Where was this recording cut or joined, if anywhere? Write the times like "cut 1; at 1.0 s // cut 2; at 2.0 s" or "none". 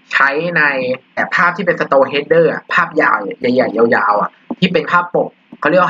cut 1; at 1.3 s